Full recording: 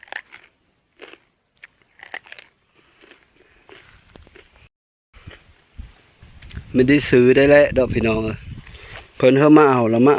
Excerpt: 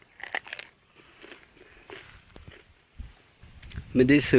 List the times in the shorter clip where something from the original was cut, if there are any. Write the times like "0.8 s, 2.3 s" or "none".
2.5 s